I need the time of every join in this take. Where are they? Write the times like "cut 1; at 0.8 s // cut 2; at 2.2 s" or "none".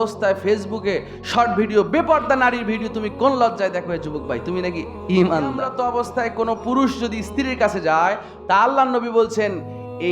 cut 1; at 5.7 s